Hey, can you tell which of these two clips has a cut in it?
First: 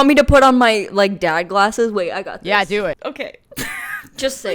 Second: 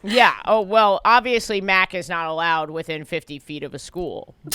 first; 1 cut; at 2.9 s

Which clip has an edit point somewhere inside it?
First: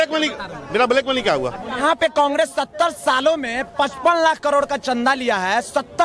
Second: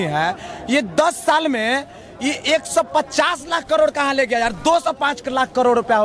first; 1 cut; at 1.8 s

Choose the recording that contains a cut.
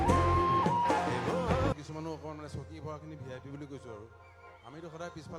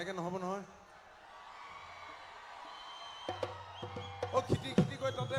first; 1 cut; at 1.7 s

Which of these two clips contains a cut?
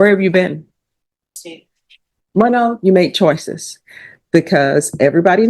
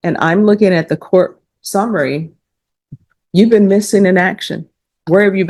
first; 1 cut; at 1.3 s

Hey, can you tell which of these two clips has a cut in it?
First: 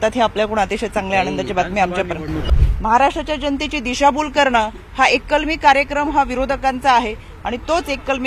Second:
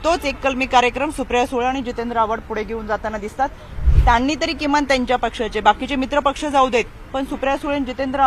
first; 1 cut; at 2.4 s

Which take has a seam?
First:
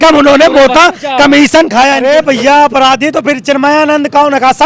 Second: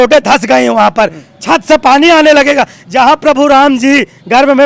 first; 1 cut; at 2.0 s

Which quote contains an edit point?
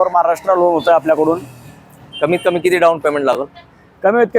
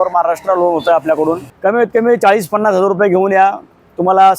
second; 1 cut; at 1.5 s

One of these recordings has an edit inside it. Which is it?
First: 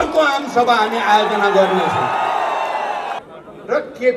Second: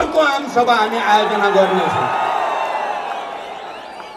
first; 1 cut; at 3.3 s

